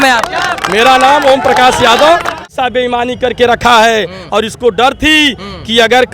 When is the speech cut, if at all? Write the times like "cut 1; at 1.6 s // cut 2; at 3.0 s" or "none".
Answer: cut 1; at 2.5 s